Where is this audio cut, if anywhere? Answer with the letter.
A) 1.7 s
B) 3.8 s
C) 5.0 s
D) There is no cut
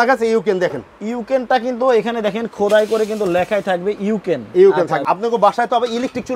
C